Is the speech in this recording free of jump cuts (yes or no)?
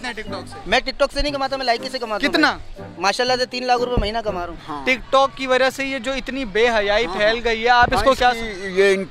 no